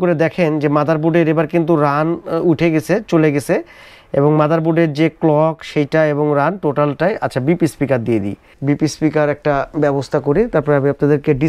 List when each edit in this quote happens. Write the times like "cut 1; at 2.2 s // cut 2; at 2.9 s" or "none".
none

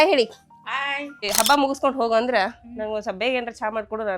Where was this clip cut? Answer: cut 1; at 1.2 s

